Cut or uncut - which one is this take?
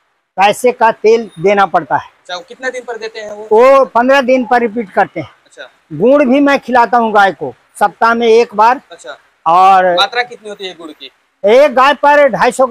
uncut